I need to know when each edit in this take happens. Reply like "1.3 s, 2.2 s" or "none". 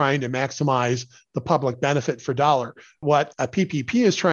3.0 s